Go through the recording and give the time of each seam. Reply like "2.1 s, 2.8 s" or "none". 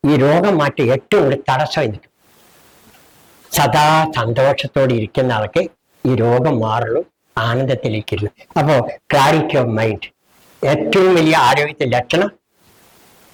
none